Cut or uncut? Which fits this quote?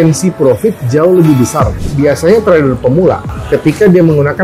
cut